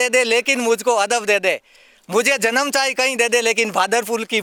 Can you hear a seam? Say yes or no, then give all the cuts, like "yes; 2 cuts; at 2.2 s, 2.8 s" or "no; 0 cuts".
no; 0 cuts